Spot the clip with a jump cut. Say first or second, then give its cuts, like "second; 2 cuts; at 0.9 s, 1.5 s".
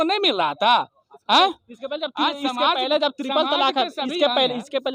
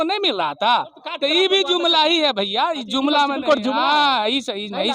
second; 1 cut; at 1.0 s